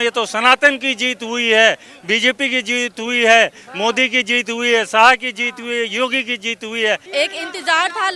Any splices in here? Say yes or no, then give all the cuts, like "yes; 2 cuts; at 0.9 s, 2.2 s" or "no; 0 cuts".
yes; 1 cut; at 7.1 s